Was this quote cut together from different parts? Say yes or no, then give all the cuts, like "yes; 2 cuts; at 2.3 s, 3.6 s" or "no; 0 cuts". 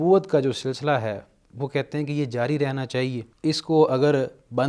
yes; 1 cut; at 3.3 s